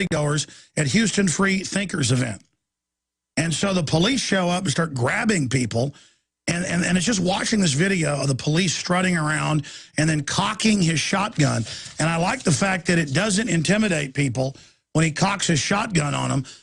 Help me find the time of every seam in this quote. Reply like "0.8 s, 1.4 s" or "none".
14.6 s